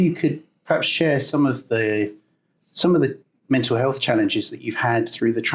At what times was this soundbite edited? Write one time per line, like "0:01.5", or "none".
none